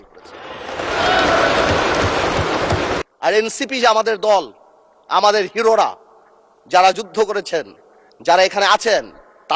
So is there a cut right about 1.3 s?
no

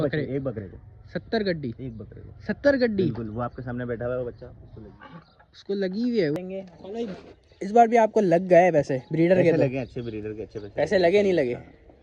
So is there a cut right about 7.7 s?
no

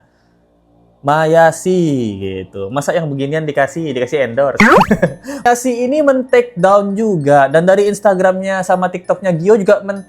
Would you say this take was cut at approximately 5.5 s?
yes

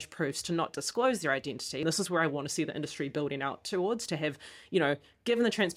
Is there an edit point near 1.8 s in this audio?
yes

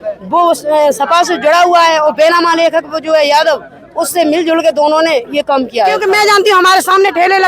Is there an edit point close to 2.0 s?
no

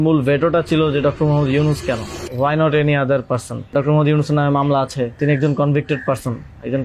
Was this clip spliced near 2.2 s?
yes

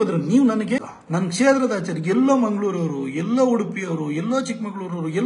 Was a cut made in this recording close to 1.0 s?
yes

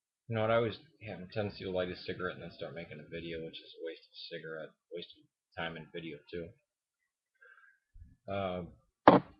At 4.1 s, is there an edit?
no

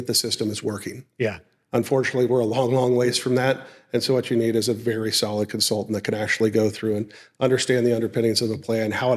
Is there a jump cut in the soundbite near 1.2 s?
no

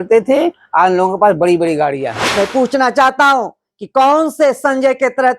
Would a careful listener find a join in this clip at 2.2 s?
yes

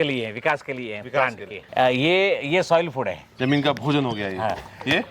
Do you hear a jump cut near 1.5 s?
yes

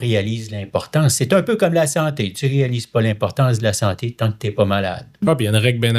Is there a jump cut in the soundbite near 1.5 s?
no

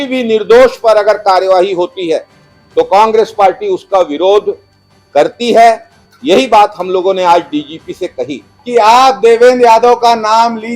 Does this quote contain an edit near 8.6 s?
yes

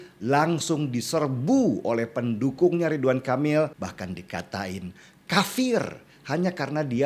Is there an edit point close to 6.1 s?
no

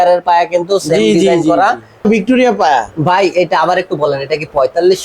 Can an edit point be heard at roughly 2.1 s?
yes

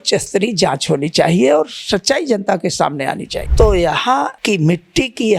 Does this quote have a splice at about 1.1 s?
no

